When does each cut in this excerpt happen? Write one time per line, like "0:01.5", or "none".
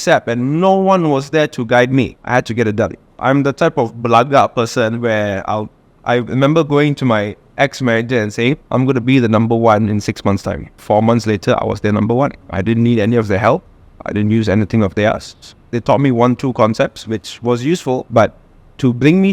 0:02.2
0:03.1
0:08.6
0:10.8
0:12.5
0:18.1